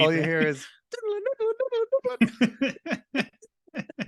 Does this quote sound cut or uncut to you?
uncut